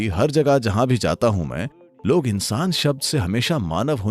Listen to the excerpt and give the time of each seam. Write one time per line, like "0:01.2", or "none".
none